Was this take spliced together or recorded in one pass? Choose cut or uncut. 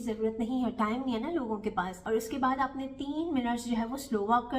cut